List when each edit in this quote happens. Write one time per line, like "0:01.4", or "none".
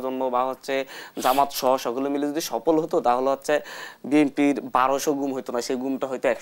none